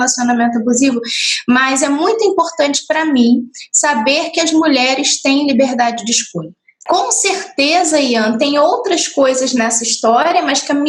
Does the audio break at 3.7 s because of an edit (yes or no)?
no